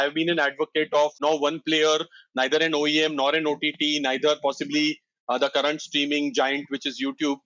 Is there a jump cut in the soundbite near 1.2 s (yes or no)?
yes